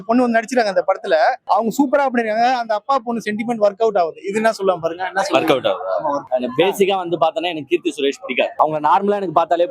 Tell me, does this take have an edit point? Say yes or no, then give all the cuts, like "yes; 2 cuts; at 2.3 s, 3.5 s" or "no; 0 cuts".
yes; 3 cuts; at 1.4 s, 6.2 s, 8.5 s